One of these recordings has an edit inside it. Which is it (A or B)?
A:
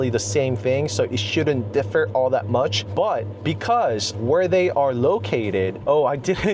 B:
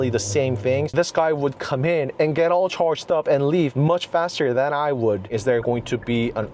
B